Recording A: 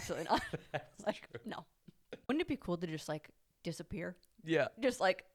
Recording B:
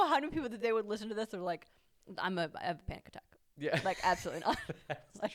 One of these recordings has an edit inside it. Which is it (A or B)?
A